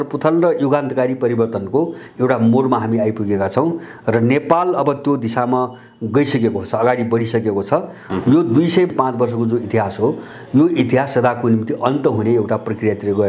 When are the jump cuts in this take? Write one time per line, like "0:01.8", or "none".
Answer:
0:08.0
0:08.9